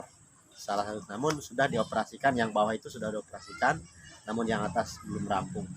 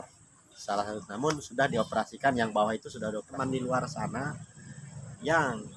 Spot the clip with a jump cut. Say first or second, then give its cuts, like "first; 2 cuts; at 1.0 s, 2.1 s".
second; 1 cut; at 3.4 s